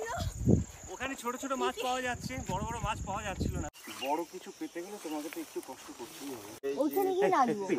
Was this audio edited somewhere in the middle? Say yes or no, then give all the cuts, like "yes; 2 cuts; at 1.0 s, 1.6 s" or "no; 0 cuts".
yes; 2 cuts; at 3.7 s, 6.6 s